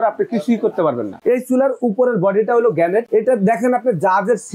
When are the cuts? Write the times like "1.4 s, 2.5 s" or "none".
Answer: 3.1 s